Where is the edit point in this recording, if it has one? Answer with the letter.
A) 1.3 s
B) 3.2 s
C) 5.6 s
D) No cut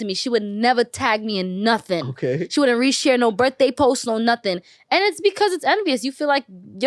D